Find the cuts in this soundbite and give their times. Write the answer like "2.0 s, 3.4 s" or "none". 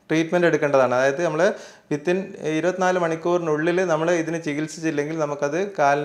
none